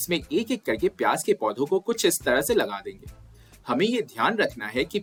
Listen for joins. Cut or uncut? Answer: uncut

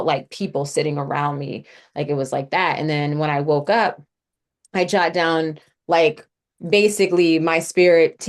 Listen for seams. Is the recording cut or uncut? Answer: uncut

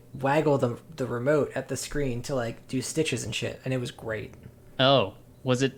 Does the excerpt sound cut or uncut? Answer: uncut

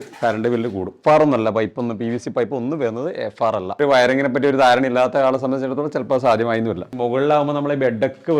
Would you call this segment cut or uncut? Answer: cut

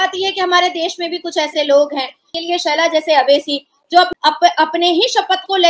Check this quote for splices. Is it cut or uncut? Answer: cut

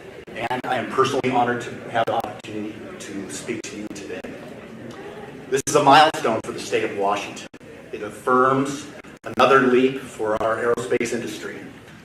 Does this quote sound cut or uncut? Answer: uncut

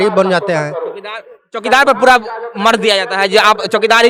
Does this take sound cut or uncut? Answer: uncut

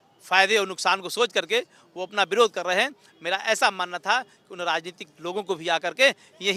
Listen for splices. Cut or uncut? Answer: uncut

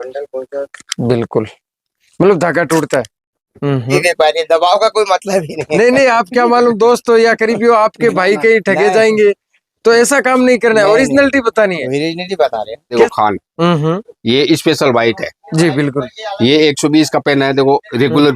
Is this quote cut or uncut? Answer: cut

